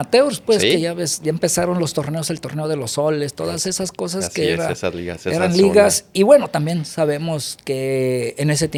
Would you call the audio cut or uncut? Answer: uncut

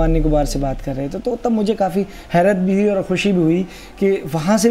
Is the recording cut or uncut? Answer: uncut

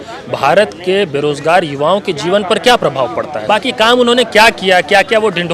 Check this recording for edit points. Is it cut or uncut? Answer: cut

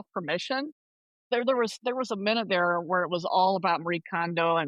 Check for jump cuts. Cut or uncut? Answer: cut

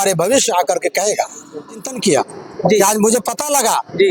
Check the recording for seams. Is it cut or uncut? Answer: cut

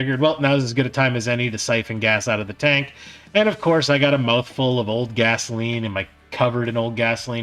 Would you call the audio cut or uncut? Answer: uncut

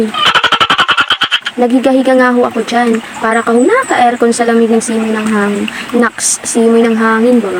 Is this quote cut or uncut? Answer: uncut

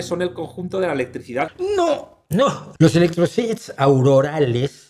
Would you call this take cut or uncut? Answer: cut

